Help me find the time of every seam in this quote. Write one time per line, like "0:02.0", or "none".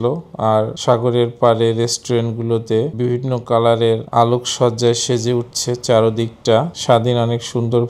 0:06.7